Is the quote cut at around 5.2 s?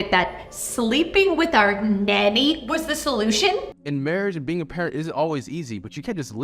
no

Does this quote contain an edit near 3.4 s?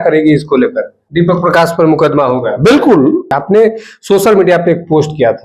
yes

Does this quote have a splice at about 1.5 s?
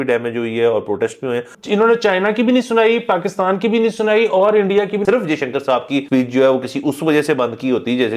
yes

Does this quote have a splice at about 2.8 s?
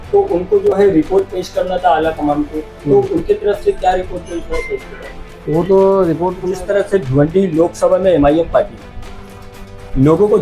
no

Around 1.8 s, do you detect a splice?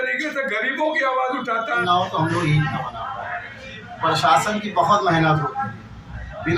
yes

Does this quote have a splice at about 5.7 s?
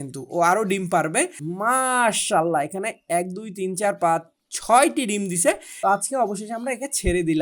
yes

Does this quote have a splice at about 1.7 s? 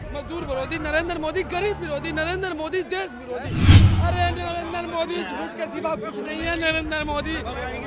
no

